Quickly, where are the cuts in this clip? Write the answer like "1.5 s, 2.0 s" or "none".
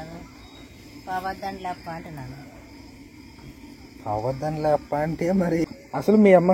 5.4 s